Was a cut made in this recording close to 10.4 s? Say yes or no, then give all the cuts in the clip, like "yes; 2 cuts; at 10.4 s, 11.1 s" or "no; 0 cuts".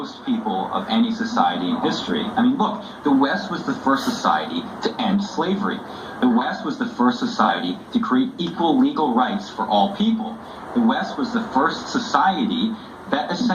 no; 1 cut; at 2.3 s